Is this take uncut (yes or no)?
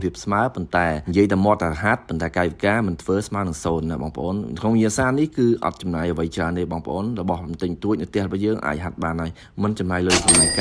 yes